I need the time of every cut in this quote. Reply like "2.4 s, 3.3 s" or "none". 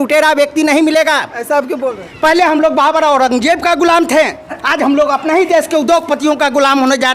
2.0 s